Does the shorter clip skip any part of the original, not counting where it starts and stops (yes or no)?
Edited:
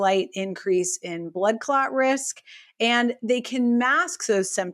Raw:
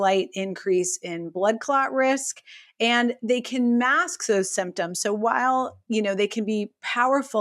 no